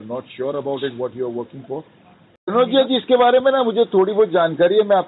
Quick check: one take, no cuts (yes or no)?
no